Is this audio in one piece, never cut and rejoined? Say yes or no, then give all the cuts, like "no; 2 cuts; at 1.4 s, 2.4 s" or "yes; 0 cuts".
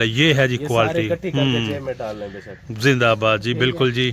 yes; 0 cuts